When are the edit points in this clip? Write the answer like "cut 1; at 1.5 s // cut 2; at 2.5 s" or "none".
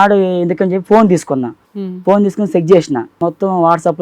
cut 1; at 1.6 s // cut 2; at 3.2 s